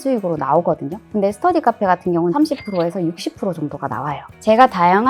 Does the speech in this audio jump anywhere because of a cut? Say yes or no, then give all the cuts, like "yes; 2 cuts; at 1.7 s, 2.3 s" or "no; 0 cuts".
yes; 2 cuts; at 2.3 s, 4.3 s